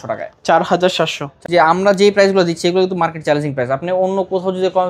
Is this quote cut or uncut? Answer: cut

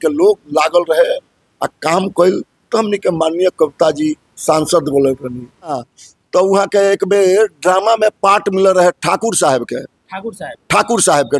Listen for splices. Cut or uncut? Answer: cut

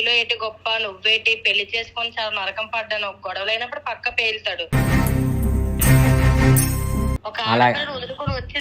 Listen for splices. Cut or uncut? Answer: cut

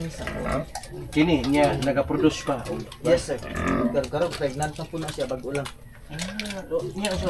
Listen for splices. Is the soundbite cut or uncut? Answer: uncut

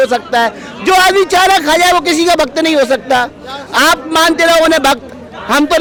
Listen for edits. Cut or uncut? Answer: uncut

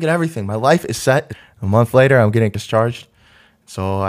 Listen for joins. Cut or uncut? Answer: cut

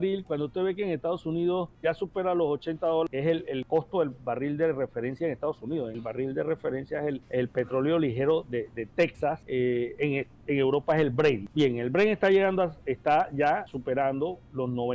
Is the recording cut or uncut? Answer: cut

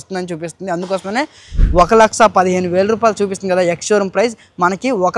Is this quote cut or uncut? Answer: cut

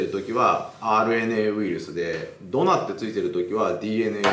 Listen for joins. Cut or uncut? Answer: uncut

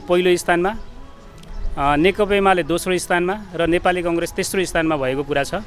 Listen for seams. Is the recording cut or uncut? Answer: uncut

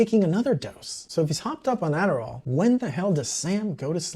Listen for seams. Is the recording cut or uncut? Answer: cut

